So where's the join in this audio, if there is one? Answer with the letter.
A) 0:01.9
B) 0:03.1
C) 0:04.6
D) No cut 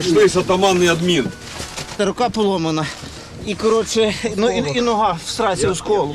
A